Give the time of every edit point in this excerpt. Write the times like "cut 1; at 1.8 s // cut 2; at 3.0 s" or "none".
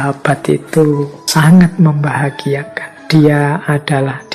cut 1; at 1.2 s